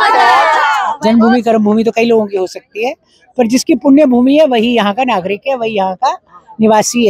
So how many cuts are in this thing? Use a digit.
1